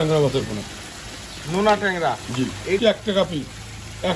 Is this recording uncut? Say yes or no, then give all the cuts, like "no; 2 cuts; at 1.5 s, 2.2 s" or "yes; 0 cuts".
no; 1 cut; at 2.8 s